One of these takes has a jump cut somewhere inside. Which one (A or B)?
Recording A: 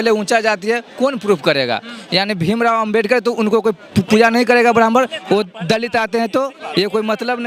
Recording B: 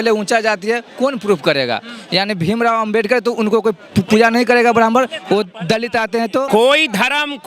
B